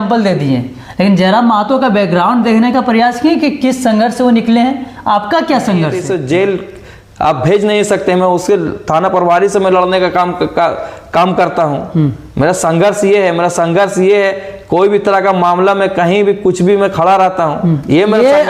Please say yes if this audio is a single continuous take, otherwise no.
no